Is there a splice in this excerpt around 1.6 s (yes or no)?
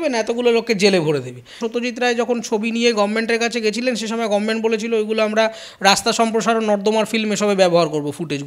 yes